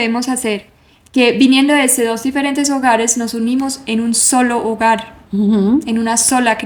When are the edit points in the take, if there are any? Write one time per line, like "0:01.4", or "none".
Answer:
none